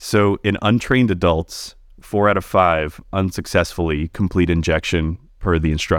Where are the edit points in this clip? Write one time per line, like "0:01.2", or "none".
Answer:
none

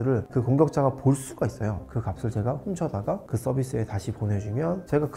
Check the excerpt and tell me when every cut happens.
0:01.8

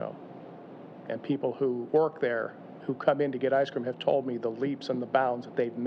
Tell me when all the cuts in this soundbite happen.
0:01.0
0:01.9

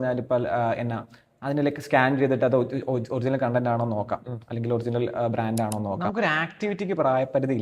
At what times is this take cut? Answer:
0:06.0

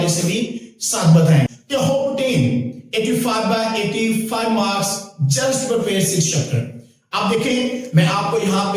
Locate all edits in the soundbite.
0:01.5

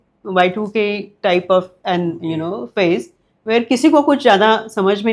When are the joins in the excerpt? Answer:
none

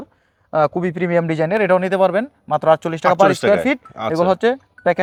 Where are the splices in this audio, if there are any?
none

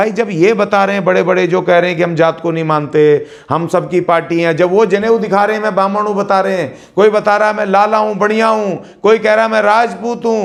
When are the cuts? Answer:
none

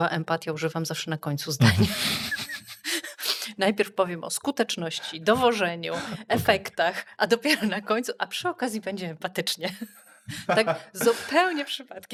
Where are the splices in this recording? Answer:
none

